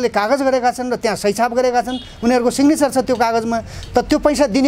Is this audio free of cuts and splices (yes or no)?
yes